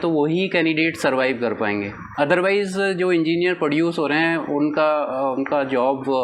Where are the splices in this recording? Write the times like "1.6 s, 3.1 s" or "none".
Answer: 2.0 s